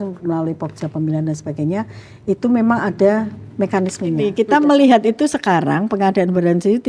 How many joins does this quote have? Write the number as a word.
one